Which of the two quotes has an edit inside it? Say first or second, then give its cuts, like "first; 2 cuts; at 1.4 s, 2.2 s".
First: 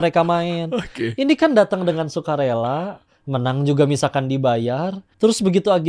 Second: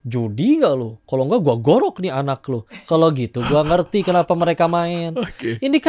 first; 1 cut; at 5.0 s